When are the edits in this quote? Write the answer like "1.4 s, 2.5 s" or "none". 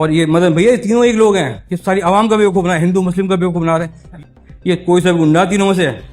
4.1 s